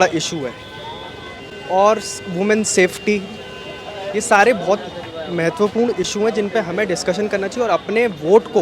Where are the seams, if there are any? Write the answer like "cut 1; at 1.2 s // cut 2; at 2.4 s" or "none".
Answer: none